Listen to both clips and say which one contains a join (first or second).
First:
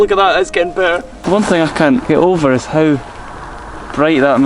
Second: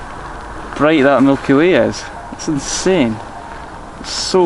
first